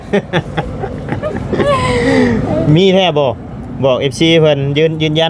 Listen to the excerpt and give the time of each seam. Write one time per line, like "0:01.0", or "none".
none